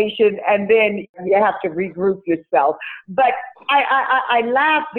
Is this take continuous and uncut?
no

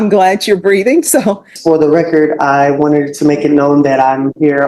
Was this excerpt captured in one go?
no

